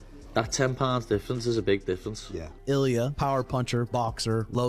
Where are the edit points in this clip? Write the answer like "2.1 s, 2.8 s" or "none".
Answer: 2.5 s